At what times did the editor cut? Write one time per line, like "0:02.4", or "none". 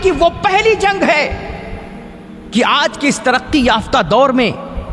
none